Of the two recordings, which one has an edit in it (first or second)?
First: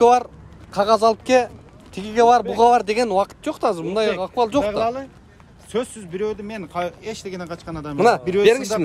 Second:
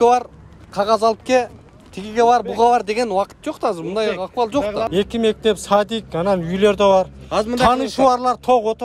second